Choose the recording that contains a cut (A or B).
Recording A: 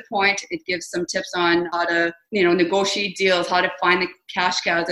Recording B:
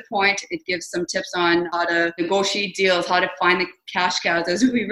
B